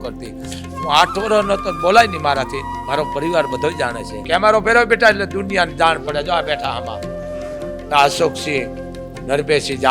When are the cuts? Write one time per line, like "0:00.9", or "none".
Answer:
0:04.1